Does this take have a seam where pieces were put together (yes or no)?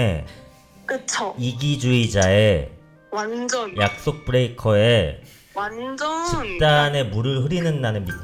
no